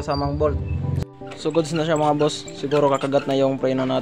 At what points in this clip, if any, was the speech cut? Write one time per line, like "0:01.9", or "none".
0:01.0